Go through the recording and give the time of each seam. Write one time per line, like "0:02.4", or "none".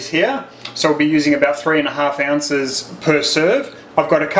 0:01.9